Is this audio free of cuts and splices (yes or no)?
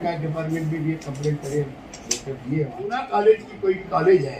no